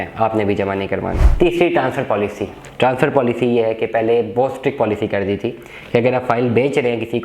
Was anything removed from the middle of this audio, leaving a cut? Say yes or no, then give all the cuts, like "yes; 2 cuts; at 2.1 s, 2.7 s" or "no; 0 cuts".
yes; 1 cut; at 1.2 s